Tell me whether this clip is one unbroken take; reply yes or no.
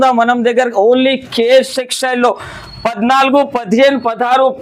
yes